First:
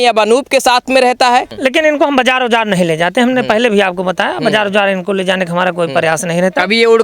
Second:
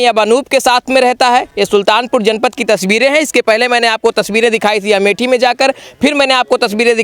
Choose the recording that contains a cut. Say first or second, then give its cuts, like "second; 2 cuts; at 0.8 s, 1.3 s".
first; 1 cut; at 1.5 s